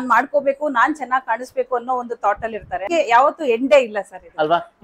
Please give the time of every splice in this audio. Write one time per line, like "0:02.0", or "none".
0:02.9